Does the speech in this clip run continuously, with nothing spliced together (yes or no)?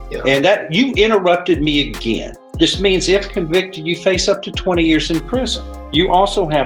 yes